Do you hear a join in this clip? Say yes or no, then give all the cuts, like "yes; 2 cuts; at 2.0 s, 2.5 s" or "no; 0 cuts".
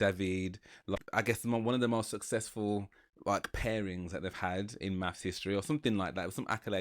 yes; 1 cut; at 0.9 s